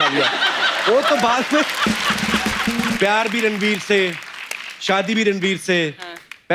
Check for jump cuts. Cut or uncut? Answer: cut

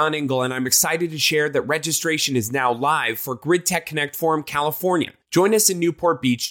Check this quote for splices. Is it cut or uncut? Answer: uncut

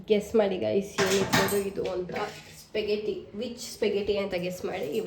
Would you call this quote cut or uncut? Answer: uncut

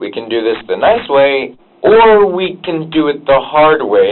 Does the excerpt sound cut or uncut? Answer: cut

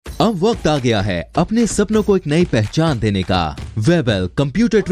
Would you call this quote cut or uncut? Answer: cut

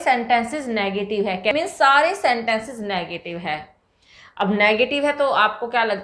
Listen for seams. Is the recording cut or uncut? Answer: cut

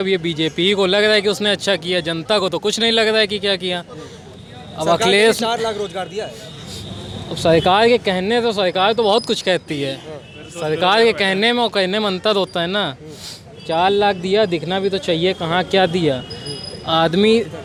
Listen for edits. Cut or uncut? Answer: uncut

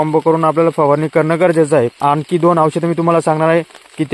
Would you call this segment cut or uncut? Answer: cut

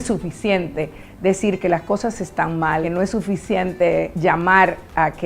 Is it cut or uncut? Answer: cut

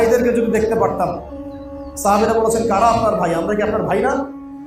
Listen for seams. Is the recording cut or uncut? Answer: uncut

